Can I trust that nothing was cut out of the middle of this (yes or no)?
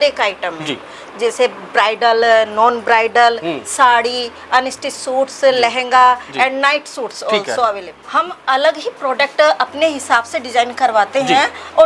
no